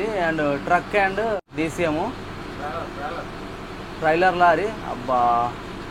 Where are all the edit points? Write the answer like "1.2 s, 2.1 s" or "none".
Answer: 1.4 s